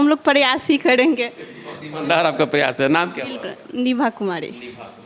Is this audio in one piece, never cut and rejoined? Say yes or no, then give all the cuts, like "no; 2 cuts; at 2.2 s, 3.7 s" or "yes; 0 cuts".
yes; 0 cuts